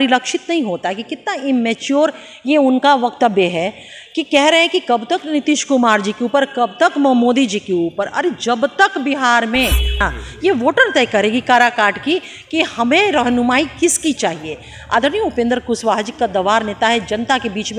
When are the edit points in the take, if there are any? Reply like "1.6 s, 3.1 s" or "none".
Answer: 10.0 s